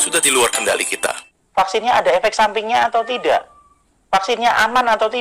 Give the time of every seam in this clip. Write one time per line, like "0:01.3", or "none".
0:01.2